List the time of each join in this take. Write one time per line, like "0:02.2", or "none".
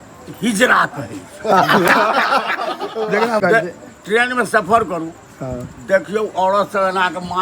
0:03.4